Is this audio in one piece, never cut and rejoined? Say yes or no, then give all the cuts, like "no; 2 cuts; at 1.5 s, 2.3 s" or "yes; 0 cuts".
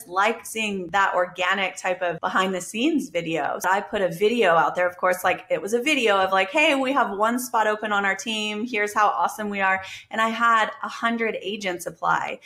no; 3 cuts; at 0.8 s, 2.2 s, 3.6 s